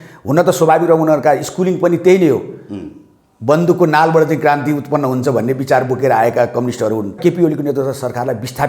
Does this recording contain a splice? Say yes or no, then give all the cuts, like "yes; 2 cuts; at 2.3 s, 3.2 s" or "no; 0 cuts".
yes; 1 cut; at 7.2 s